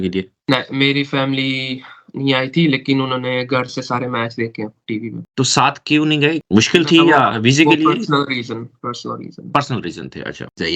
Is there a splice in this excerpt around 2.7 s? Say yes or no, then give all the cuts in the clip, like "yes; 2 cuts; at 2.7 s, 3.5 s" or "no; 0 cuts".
no; 0 cuts